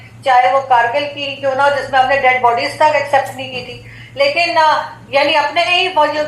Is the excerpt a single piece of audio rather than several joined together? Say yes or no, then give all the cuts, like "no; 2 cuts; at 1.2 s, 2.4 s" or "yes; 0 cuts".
yes; 0 cuts